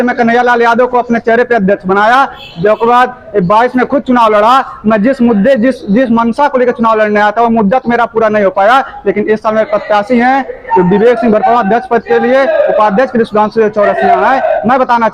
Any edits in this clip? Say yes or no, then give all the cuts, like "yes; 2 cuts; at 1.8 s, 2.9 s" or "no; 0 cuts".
no; 0 cuts